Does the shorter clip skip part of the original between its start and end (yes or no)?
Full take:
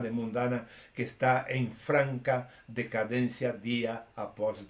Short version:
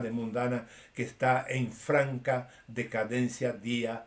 no